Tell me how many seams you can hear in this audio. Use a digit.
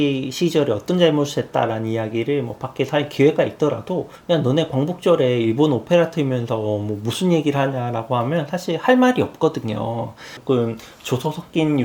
1